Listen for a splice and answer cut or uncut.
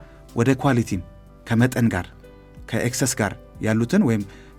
uncut